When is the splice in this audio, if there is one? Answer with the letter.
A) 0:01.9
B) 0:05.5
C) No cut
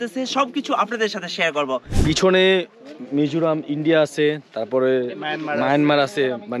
A